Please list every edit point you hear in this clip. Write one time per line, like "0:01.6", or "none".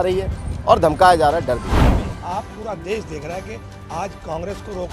0:02.1